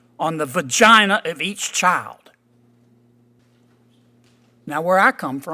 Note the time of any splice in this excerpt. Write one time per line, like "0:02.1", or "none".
0:03.4